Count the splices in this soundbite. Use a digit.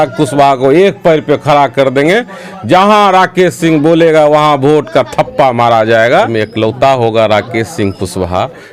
1